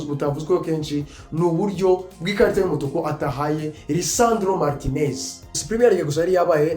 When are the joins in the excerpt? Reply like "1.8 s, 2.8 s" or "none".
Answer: 5.6 s

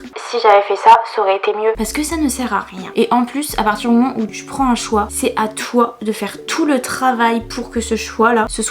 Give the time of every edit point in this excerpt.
none

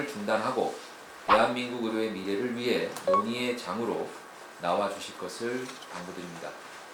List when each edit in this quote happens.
none

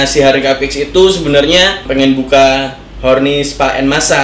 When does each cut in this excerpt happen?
1.9 s

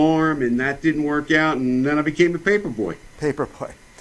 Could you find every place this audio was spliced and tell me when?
1.9 s

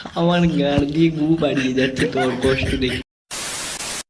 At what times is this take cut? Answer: 3.1 s

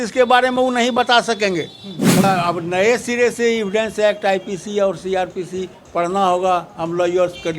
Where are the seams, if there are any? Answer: 2.2 s

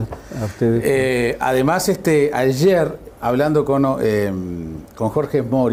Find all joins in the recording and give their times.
none

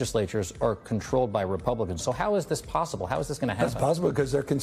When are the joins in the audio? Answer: none

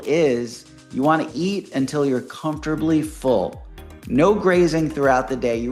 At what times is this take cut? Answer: none

